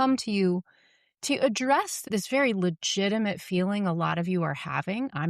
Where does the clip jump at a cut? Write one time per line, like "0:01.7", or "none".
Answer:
0:02.1